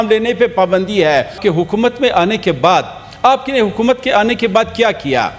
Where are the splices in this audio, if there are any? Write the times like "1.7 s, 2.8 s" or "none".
1.4 s